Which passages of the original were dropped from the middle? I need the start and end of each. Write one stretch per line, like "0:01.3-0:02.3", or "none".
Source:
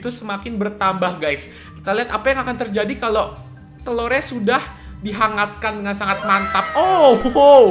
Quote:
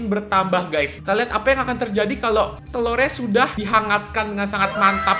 0:01.4-0:01.7
0:03.4-0:03.7
0:04.7-0:05.1